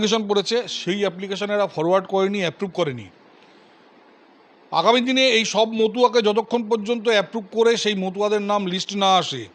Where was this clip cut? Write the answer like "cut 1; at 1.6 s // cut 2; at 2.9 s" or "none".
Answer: none